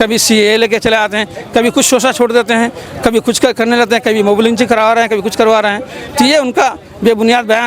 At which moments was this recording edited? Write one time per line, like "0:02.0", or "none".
none